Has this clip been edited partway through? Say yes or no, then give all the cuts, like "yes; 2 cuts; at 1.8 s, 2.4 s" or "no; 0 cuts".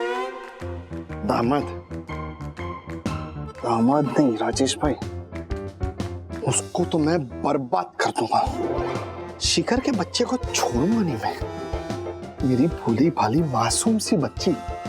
no; 0 cuts